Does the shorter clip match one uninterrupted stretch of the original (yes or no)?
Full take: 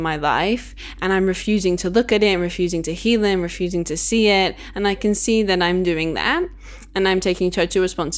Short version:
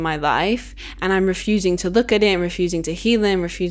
yes